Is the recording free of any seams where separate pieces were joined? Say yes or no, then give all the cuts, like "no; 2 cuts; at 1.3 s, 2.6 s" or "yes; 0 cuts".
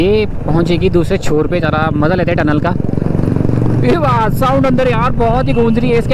yes; 0 cuts